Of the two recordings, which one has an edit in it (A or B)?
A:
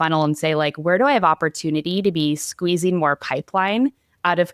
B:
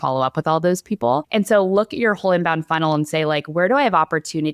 B